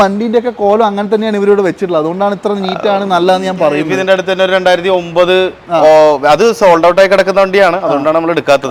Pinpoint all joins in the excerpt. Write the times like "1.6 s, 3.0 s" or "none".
none